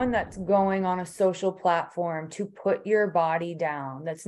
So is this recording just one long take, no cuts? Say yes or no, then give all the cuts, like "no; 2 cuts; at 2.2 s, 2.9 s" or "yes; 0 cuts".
yes; 0 cuts